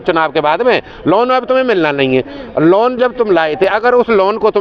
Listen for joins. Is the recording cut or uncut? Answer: uncut